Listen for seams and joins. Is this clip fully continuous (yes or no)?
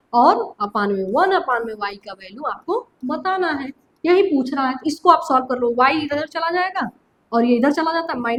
yes